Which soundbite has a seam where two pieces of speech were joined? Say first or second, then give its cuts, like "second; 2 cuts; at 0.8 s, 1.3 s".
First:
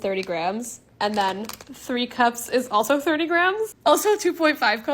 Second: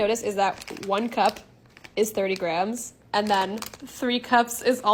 first; 1 cut; at 3.7 s